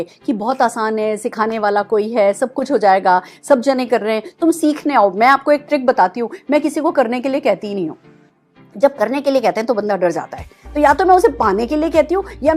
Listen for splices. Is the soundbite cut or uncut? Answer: uncut